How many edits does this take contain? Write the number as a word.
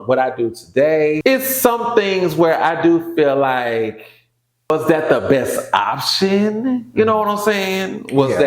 two